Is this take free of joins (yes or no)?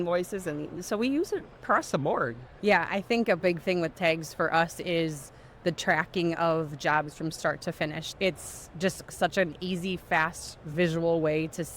no